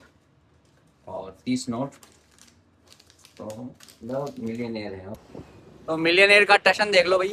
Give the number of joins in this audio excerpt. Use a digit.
1